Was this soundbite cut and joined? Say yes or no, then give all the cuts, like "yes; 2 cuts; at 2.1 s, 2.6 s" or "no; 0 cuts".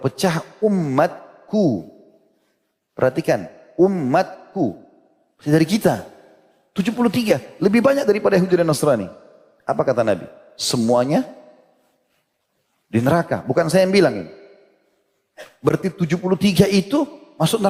no; 0 cuts